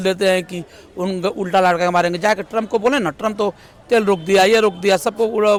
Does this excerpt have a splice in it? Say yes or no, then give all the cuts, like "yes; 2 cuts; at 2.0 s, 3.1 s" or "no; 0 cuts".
no; 0 cuts